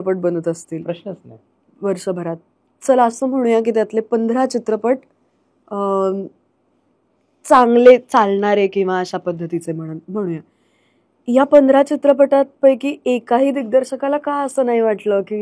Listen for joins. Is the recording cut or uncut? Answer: uncut